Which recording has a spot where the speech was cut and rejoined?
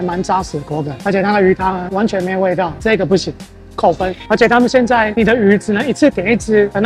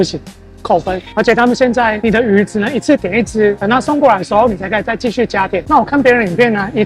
second; 1 cut; at 5.6 s

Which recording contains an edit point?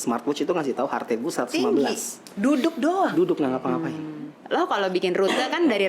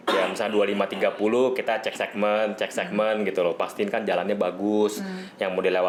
first; 1 cut; at 4.4 s

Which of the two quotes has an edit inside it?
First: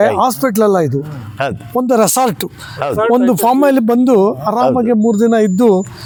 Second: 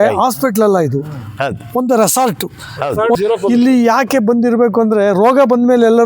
second; 1 cut; at 3.2 s

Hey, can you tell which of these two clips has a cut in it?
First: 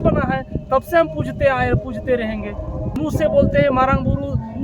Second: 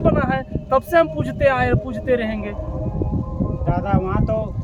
first; 1 cut; at 3.0 s

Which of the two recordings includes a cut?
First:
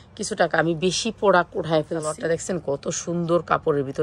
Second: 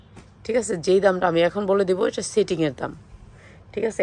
first; 1 cut; at 2.2 s

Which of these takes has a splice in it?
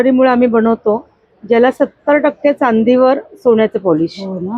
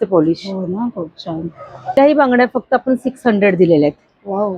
second; 1 cut; at 2.0 s

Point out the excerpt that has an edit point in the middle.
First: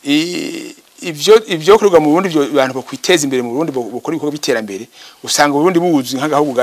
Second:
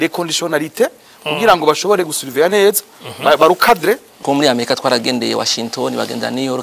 second; 1 cut; at 4.1 s

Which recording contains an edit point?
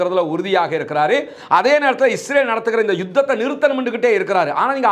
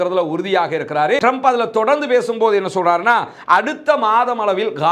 second; 1 cut; at 1.2 s

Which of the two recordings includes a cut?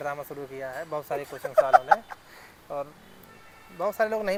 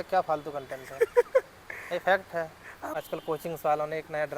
second; 1 cut; at 2.9 s

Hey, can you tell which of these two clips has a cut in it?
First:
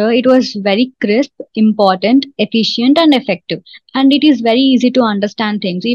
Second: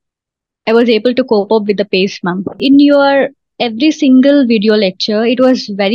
second; 1 cut; at 2.6 s

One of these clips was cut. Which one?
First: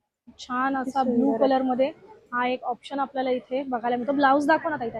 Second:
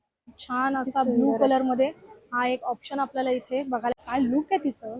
second; 1 cut; at 3.9 s

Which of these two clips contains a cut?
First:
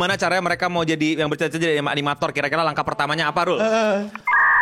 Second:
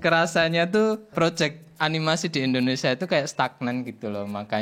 second; 1 cut; at 1.1 s

